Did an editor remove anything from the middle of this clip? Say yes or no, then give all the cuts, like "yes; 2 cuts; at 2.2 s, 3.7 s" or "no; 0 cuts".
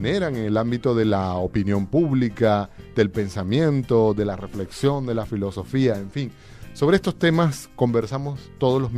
yes; 1 cut; at 1.4 s